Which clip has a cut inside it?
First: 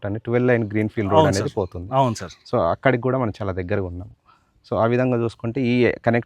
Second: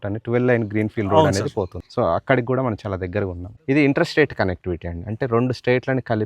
second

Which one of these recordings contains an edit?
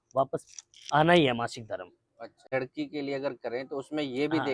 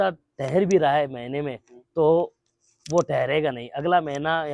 first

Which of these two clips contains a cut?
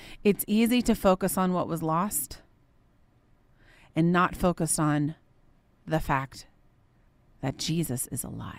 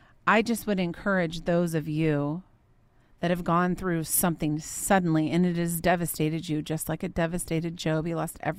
second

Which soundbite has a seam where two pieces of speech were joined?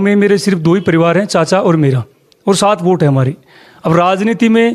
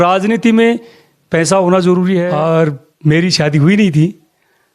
second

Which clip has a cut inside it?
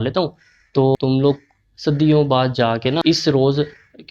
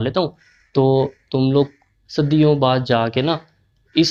first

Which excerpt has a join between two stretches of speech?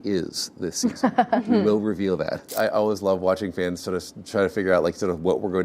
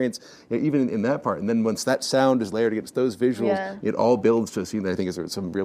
first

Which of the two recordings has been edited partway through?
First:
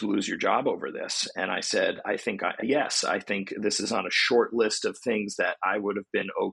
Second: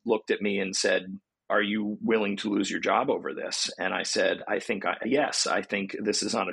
second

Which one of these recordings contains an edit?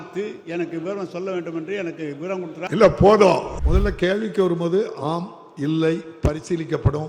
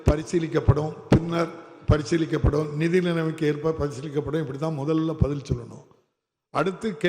first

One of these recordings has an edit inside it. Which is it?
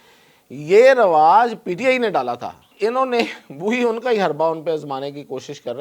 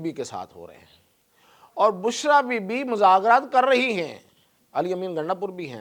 first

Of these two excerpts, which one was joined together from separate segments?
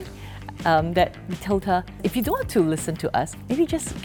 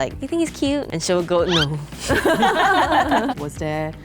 second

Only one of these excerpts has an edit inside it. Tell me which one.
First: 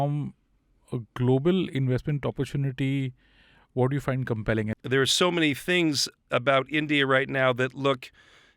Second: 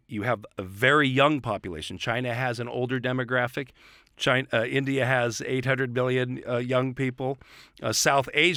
first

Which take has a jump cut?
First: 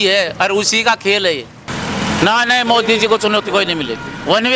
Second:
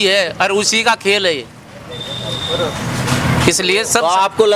first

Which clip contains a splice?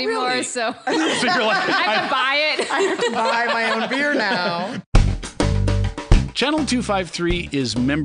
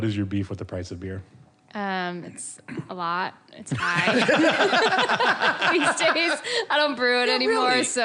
first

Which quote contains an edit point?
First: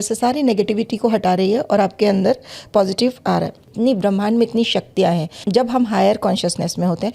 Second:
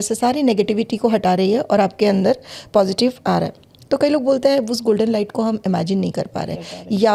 first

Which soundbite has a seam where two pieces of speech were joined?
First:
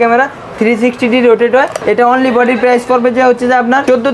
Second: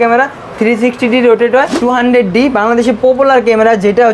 second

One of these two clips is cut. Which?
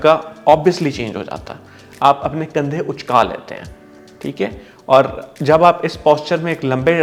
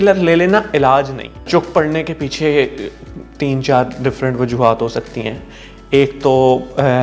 second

